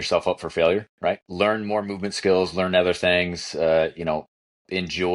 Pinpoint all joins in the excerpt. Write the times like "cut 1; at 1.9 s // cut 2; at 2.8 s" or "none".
cut 1; at 1.2 s